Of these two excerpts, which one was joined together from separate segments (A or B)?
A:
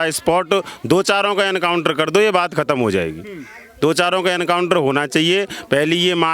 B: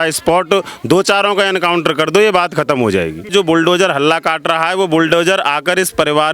B